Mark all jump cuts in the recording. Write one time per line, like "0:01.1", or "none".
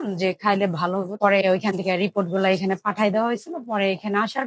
0:01.2